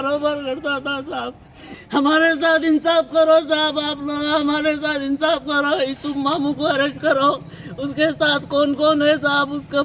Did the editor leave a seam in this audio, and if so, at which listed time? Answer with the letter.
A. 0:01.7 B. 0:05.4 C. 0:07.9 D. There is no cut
A